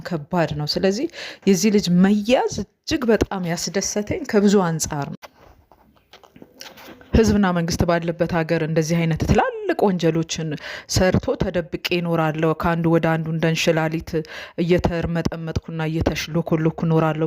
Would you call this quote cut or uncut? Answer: cut